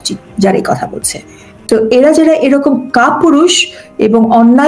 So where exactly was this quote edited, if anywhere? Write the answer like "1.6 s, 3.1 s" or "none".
1.5 s